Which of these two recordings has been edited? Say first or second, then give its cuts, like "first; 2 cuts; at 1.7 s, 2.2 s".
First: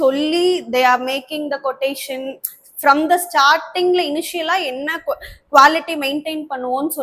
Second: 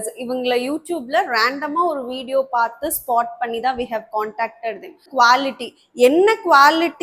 second; 1 cut; at 5.0 s